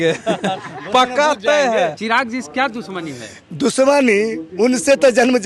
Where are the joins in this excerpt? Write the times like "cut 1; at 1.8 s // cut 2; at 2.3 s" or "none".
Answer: cut 1; at 2.0 s